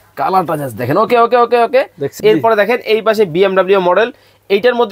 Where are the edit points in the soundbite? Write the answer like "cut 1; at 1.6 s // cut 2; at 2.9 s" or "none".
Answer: cut 1; at 2.1 s